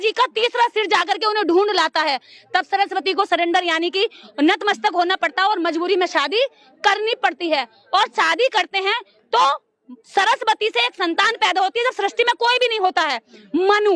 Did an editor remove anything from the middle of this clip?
no; 0 cuts

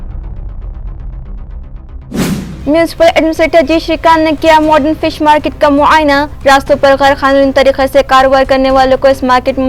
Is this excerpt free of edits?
no; 1 cut; at 2.6 s

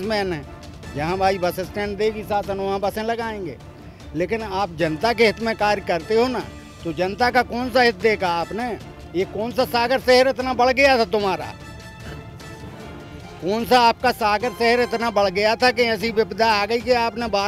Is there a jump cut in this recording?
no; 0 cuts

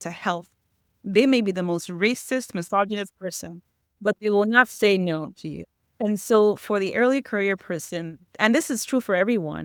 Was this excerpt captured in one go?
yes; 0 cuts

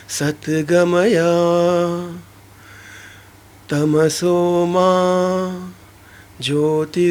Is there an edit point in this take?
no; 0 cuts

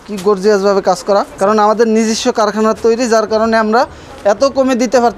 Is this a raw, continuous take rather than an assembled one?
no; 1 cut; at 1.3 s

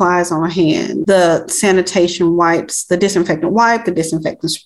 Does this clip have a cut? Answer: yes; 1 cut; at 1.0 s

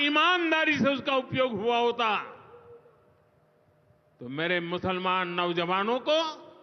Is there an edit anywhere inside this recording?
no; 0 cuts

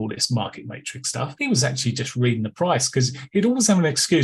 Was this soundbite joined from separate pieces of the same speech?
yes; 1 cut; at 1.3 s

